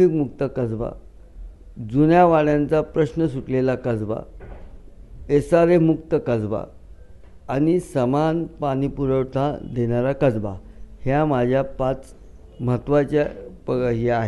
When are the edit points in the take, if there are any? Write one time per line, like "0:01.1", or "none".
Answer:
none